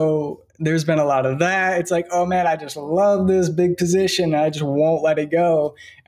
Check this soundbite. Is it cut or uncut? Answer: uncut